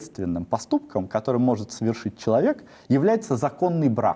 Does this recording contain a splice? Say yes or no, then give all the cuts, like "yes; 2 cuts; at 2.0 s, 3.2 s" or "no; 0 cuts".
no; 0 cuts